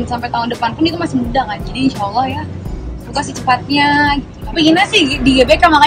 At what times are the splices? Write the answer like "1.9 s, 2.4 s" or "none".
4.4 s

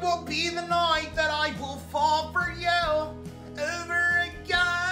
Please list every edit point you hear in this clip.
none

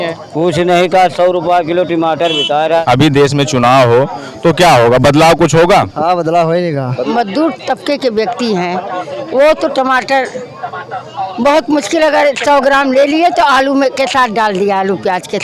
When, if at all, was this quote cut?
2.8 s, 7.0 s

